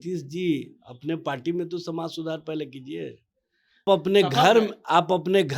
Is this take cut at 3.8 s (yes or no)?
yes